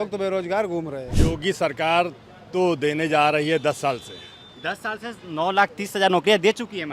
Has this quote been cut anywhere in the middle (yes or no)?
yes